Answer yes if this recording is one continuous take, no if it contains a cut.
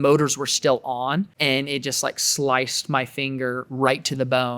no